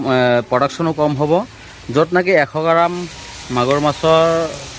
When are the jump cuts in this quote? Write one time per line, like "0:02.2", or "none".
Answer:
none